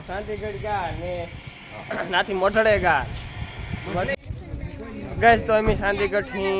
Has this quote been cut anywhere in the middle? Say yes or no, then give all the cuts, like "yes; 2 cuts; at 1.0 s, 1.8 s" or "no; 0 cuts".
yes; 1 cut; at 4.2 s